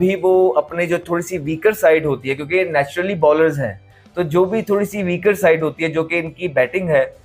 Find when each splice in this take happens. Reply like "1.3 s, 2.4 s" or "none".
none